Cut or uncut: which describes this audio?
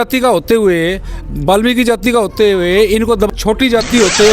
cut